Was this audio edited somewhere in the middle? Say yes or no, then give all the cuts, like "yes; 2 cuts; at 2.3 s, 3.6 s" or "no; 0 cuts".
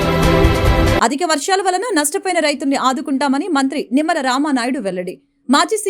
yes; 1 cut; at 0.9 s